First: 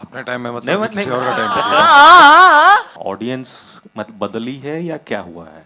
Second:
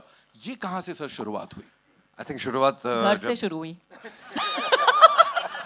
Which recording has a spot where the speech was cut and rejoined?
first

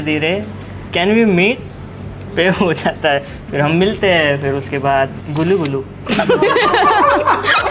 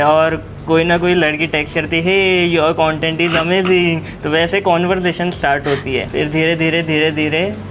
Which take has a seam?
second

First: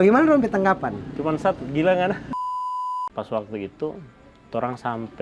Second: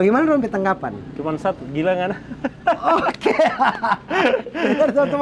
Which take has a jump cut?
first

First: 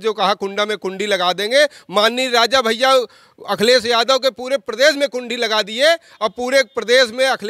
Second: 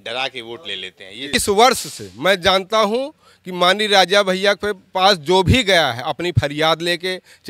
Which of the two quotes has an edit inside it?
second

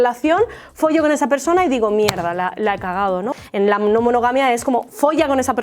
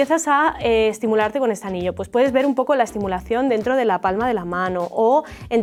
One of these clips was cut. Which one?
first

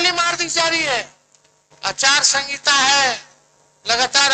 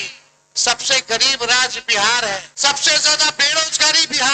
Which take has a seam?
second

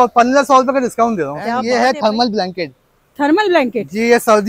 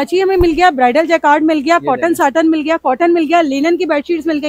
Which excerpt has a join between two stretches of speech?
first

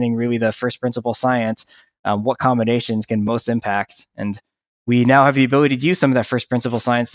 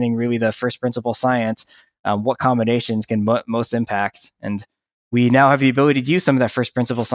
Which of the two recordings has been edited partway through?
first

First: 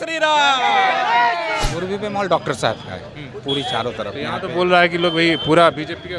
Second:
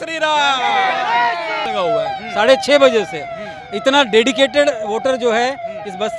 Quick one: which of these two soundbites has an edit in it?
first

